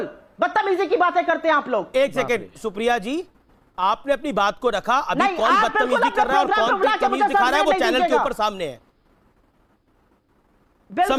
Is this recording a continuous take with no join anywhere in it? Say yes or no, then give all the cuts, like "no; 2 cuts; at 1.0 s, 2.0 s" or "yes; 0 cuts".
yes; 0 cuts